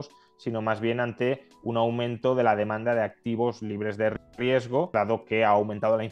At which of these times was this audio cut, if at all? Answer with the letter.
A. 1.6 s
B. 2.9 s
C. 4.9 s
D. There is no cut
C